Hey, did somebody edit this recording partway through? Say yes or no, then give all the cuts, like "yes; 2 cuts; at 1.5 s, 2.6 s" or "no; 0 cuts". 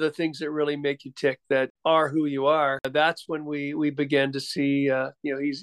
yes; 2 cuts; at 1.7 s, 2.9 s